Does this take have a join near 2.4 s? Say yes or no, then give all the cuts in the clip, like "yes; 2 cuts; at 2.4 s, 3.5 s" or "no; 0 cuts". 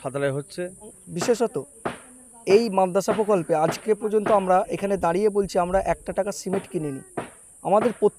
no; 1 cut; at 1.0 s